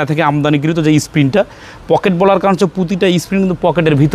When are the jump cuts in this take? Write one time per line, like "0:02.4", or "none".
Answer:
none